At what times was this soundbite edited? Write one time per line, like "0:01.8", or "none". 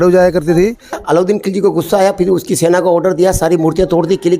0:01.0